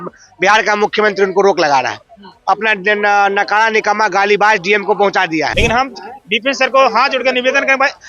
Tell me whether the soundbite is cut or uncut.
cut